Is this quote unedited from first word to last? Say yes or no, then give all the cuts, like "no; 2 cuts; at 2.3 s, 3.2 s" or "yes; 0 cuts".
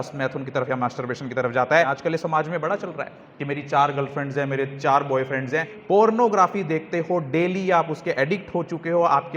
no; 2 cuts; at 2.2 s, 5.9 s